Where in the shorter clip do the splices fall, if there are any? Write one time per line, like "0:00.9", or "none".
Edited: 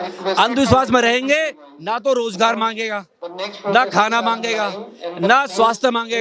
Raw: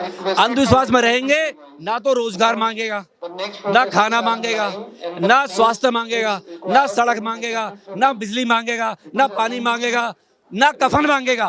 none